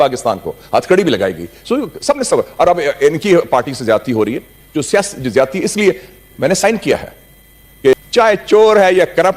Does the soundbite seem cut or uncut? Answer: cut